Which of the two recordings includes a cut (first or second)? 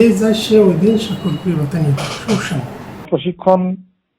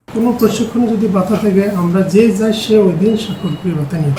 first